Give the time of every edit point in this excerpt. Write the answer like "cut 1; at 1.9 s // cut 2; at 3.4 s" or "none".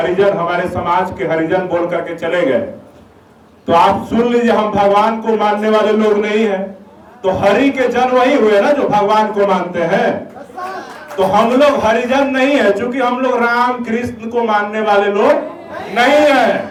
none